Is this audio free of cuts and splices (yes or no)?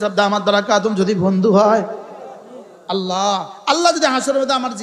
yes